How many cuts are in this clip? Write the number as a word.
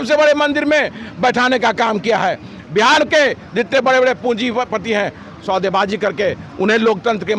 zero